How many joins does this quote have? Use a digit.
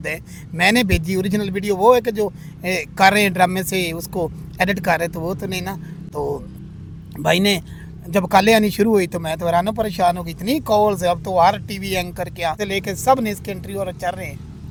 0